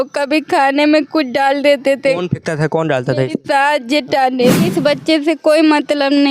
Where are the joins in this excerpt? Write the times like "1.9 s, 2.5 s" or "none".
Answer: 4.7 s